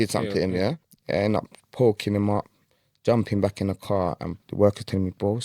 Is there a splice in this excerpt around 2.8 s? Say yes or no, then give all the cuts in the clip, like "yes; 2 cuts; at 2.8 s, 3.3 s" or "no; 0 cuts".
no; 2 cuts; at 0.9 s, 4.4 s